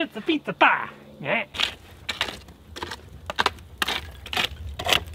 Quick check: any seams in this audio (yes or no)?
no